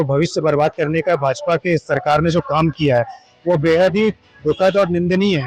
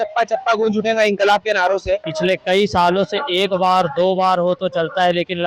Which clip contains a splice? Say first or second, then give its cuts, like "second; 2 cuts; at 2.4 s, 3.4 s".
second; 1 cut; at 2.1 s